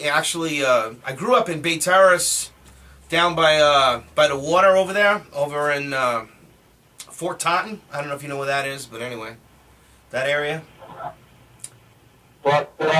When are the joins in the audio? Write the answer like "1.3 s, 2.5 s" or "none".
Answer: 1.2 s